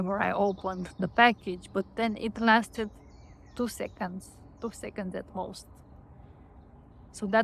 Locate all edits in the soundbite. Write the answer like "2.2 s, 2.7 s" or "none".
none